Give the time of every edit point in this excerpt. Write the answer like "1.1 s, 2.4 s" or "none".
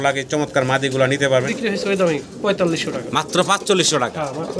1.5 s

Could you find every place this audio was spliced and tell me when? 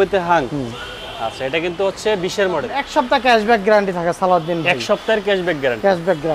2.8 s

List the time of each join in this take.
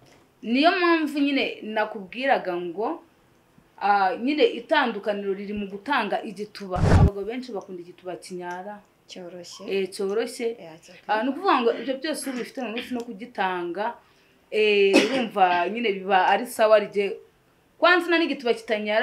6.9 s

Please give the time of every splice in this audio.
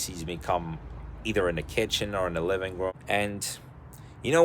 3.0 s

